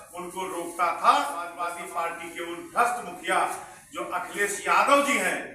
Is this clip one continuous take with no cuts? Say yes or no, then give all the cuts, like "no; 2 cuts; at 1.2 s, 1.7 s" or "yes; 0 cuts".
no; 1 cut; at 1.6 s